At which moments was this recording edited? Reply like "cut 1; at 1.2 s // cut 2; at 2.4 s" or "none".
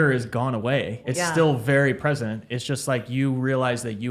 cut 1; at 1.1 s